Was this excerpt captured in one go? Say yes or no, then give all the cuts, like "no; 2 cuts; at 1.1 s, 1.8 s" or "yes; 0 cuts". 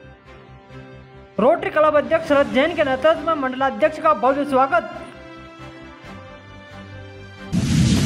yes; 0 cuts